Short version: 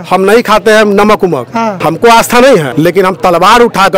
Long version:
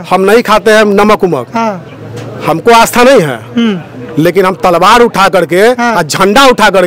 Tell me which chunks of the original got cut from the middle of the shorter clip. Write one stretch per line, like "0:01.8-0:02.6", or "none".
0:01.8-0:02.4
0:03.3-0:04.1